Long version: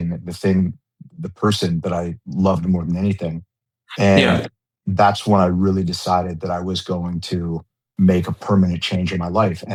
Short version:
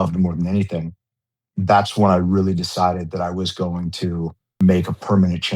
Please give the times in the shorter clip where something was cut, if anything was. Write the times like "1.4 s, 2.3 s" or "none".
1.3 s, 4.4 s